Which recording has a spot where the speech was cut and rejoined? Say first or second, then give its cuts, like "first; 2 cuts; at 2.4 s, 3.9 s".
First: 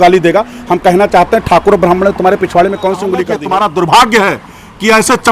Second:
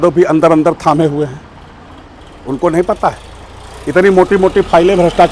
first; 1 cut; at 3.3 s